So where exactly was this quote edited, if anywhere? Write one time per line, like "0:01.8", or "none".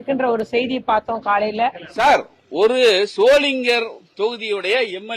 0:01.8